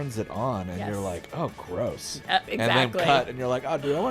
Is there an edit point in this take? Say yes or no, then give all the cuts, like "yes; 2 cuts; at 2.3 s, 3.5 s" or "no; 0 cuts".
yes; 1 cut; at 2.4 s